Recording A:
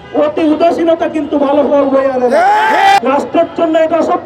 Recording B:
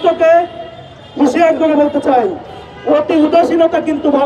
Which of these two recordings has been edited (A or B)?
A